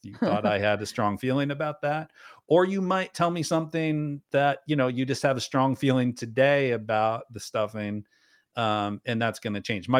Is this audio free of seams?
yes; 0 cuts

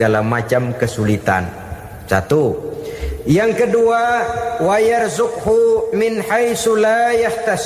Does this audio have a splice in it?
no; 0 cuts

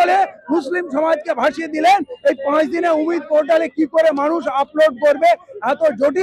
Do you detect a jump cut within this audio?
no; 0 cuts

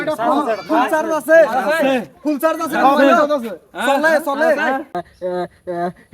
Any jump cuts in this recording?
yes; 1 cut; at 5.0 s

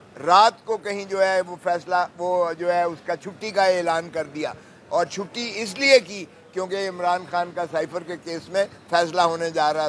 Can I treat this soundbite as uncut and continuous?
yes; 0 cuts

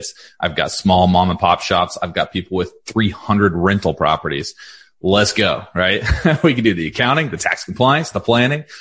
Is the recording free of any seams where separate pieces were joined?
yes; 0 cuts

